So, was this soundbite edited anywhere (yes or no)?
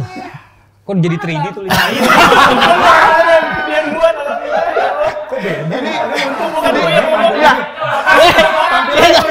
no